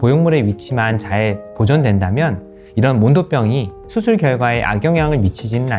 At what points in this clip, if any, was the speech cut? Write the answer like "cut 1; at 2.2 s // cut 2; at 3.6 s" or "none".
cut 1; at 2.5 s